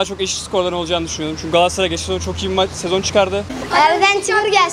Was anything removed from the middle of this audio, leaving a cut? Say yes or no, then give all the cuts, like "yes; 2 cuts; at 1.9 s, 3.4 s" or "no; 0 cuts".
yes; 1 cut; at 3.6 s